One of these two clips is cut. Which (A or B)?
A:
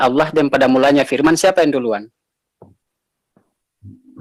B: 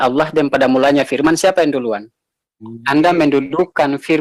B